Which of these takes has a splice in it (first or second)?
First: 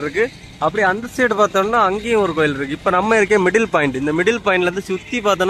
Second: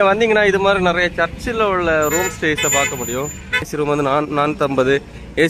second